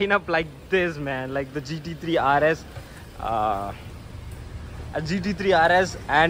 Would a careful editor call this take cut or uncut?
uncut